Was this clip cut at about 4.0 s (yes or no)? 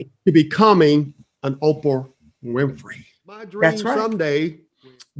yes